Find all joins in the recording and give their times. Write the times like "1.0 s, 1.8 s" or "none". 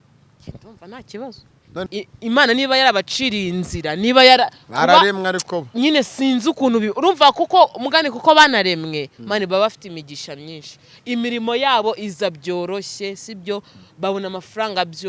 1.9 s

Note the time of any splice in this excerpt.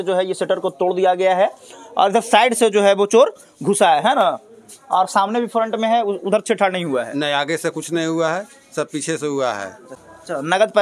9.9 s

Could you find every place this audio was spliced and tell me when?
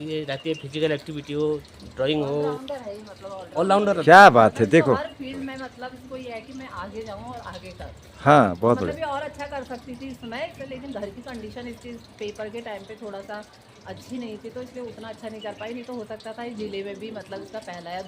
none

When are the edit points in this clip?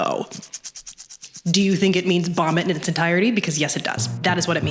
none

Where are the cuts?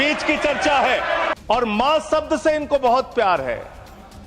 1.3 s

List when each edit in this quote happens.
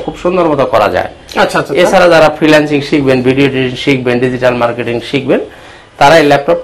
none

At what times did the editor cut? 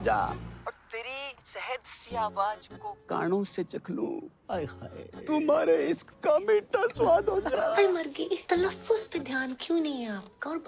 8.4 s

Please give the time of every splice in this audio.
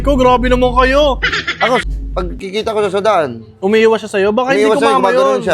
1.8 s

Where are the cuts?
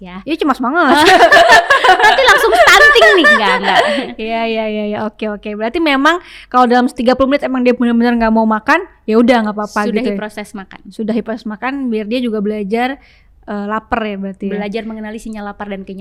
none

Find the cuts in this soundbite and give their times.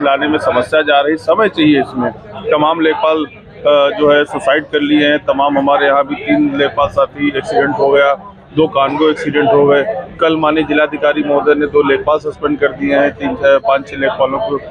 none

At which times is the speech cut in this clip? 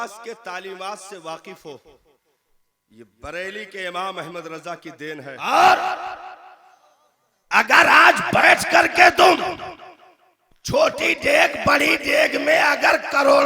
5.3 s

